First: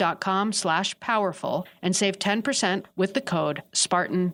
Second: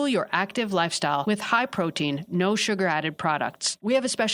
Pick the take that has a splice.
second; 1 cut; at 1.2 s

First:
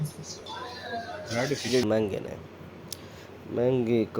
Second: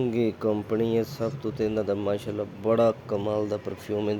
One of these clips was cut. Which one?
first; 1 cut; at 1.8 s

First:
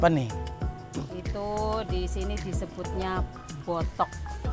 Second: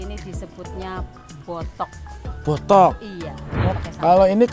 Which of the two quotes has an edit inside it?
second; 1 cut; at 3.6 s

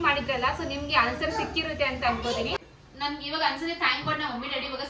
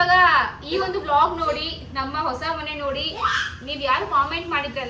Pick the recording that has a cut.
first; 1 cut; at 2.6 s

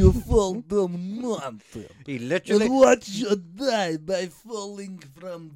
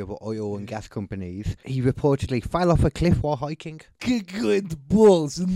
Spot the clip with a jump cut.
second; 2 cuts; at 1.6 s, 3.9 s

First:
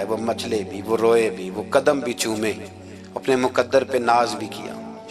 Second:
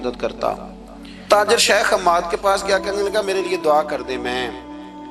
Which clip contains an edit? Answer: second; 1 cut; at 1.3 s

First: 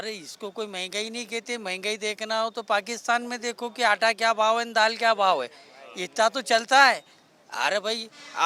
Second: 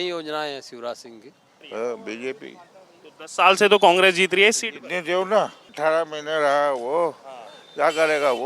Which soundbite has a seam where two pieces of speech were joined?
second; 2 cuts; at 1.7 s, 5.8 s

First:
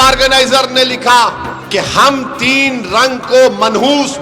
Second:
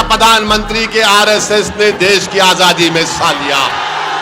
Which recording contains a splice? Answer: first; 1 cut; at 1.5 s

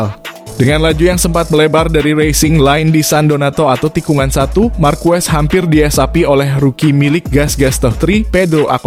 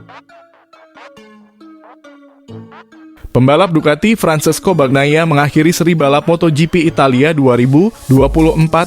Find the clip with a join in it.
second; 1 cut; at 3.2 s

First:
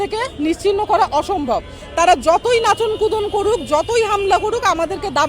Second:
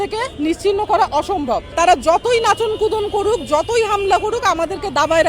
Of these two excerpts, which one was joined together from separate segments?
second; 1 cut; at 1.7 s

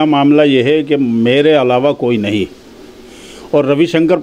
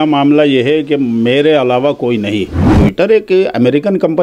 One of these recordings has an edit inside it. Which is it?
second; 1 cut; at 2.7 s

